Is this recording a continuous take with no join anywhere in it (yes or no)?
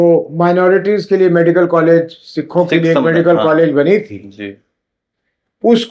yes